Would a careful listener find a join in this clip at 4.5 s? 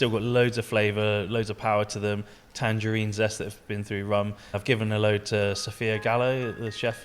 yes; 1 cut; at 4.5 s

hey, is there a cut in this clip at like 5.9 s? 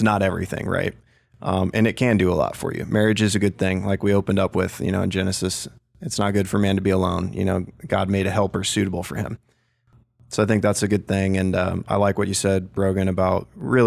no; 1 cut; at 9.9 s

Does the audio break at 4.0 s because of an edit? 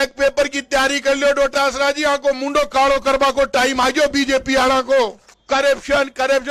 no; 1 cut; at 5.3 s

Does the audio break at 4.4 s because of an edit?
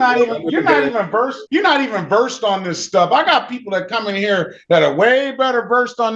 no; 1 cut; at 1.4 s

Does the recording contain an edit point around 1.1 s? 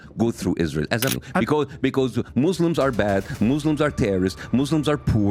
yes; 1 cut; at 1.1 s

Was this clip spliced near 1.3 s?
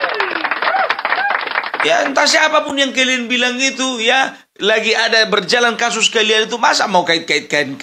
yes; 1 cut; at 1.3 s

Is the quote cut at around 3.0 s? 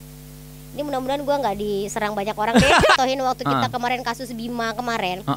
yes; 1 cut; at 3.0 s

